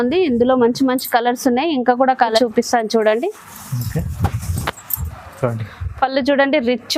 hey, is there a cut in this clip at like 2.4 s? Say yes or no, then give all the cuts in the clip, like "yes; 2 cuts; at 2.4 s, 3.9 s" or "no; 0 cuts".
yes; 1 cut; at 2.4 s